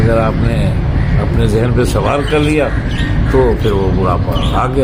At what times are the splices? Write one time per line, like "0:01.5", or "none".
none